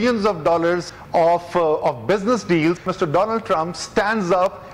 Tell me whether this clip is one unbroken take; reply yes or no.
no